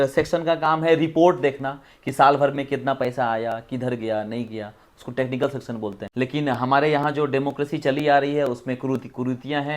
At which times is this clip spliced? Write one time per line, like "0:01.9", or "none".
0:06.0